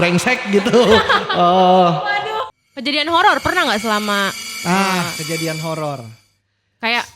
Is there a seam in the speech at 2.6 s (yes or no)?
yes